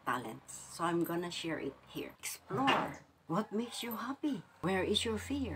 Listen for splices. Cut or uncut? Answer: cut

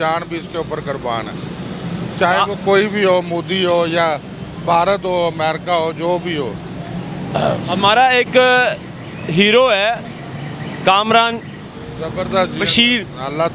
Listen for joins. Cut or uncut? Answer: uncut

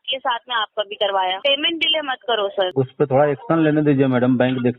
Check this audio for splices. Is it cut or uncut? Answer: cut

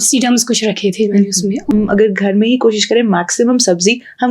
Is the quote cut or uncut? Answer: cut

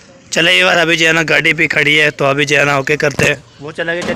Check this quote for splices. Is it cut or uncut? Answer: uncut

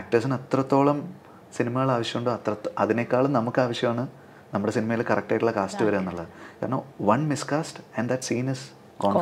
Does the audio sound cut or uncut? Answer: uncut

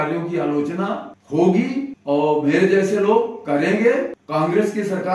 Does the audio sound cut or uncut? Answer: cut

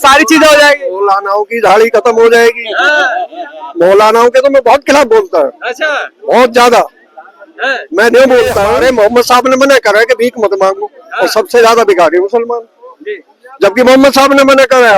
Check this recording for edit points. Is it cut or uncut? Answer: cut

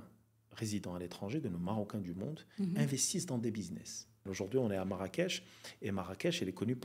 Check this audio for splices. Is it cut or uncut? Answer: cut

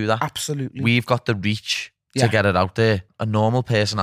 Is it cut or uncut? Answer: cut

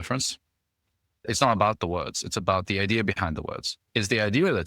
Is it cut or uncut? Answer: cut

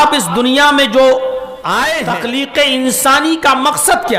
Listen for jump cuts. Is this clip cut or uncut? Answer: cut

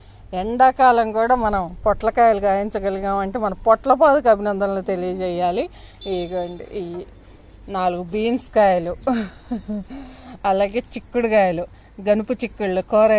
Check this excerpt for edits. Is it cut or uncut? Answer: uncut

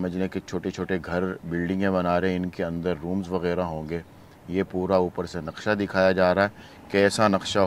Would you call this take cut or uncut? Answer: uncut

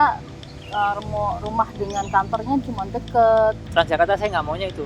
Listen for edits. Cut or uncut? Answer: cut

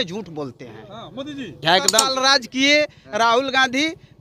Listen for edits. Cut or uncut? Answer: cut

